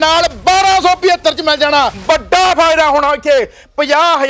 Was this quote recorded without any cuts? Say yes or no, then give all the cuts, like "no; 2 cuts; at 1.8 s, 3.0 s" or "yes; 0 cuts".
no; 1 cut; at 2.0 s